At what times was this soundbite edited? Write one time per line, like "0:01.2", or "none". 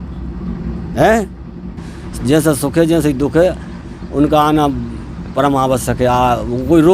0:01.7